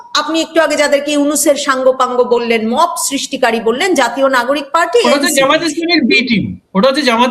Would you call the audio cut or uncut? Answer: uncut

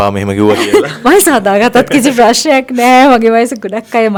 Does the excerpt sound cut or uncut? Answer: uncut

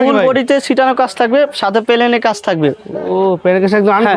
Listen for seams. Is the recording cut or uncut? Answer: uncut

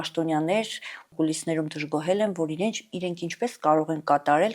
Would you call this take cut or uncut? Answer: cut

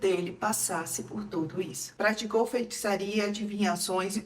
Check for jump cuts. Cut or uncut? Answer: cut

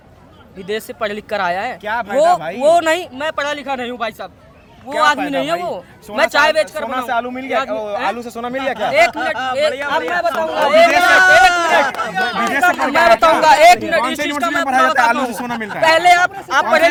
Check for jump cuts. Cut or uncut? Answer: uncut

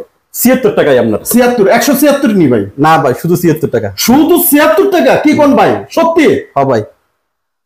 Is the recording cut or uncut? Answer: uncut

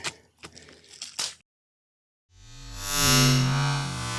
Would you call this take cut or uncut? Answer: uncut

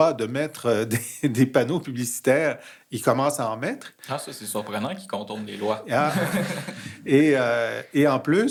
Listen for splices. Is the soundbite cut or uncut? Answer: uncut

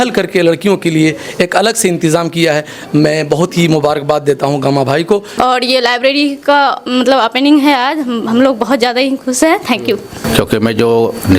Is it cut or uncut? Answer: cut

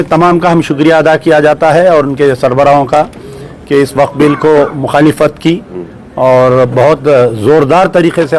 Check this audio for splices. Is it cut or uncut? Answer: uncut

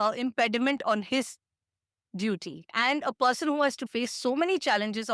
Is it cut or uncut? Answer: cut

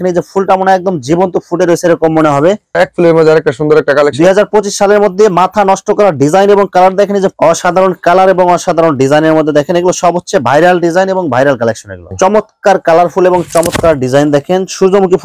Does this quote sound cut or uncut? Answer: cut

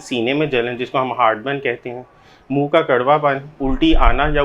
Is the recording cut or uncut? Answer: cut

